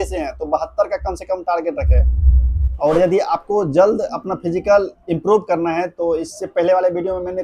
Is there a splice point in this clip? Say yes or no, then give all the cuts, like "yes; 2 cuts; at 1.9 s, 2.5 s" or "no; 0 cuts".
yes; 1 cut; at 2.7 s